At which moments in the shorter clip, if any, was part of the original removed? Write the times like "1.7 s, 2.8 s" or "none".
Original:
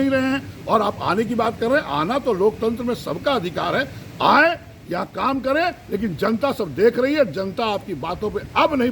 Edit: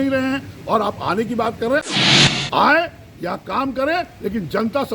2.0 s